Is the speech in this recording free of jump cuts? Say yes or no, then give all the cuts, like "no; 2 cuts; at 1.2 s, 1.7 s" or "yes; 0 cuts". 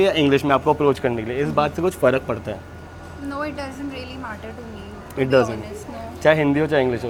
yes; 0 cuts